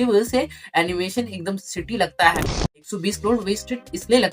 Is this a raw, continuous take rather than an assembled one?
no; 1 cut; at 2.8 s

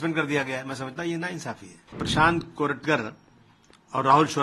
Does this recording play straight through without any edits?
no; 1 cut; at 2.0 s

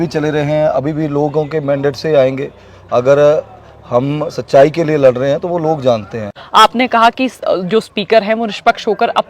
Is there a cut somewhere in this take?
yes; 1 cut; at 6.4 s

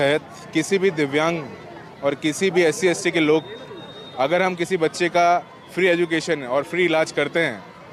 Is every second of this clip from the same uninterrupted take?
yes; 0 cuts

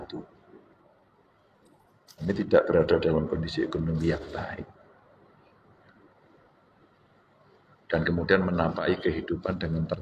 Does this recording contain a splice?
no; 0 cuts

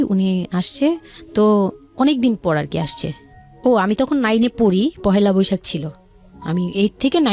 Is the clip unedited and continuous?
yes; 0 cuts

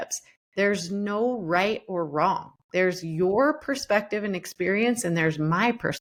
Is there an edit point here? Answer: no; 0 cuts

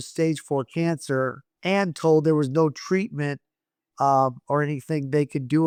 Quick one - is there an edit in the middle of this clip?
no; 0 cuts

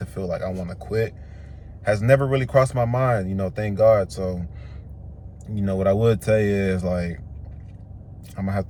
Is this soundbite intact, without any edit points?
yes; 0 cuts

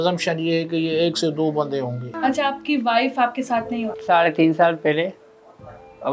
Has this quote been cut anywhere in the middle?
yes; 2 cuts; at 2.0 s, 3.9 s

